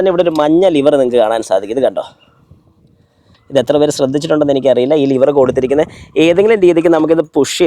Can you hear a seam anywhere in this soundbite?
no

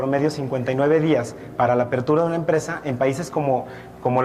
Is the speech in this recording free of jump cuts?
no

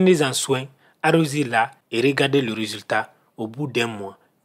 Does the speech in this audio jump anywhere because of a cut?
yes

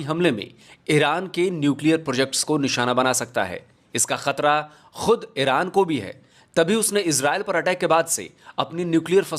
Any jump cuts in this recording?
no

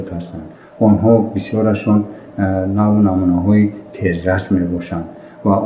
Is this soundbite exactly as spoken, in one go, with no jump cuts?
yes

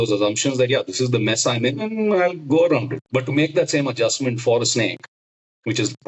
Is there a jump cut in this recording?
yes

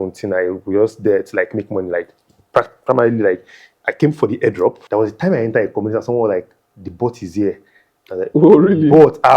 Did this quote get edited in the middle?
yes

